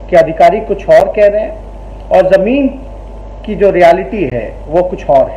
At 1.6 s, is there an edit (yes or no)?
no